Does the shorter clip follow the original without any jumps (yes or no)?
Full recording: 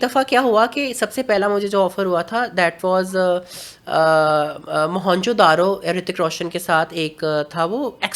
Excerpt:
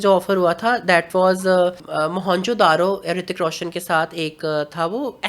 no